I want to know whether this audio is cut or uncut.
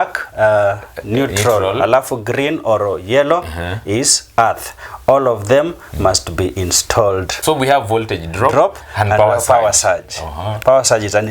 cut